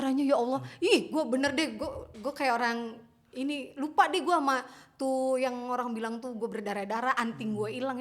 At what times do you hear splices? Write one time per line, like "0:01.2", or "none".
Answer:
none